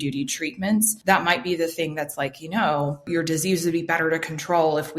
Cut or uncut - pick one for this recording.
cut